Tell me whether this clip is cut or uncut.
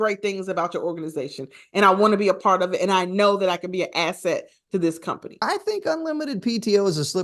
cut